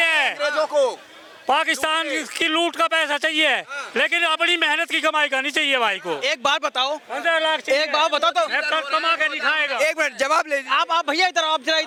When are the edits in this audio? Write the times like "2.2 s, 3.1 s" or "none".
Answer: none

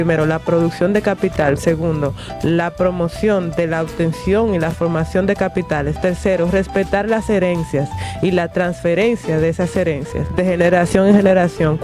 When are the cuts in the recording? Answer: 10.3 s

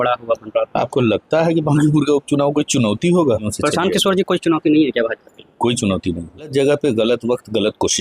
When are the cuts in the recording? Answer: 3.5 s, 6.5 s

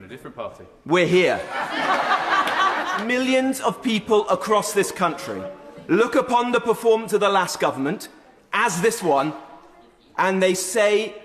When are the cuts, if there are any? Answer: 3.0 s

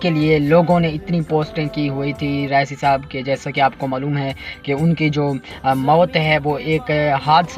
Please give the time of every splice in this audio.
none

